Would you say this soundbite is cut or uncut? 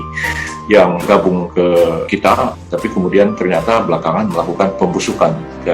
cut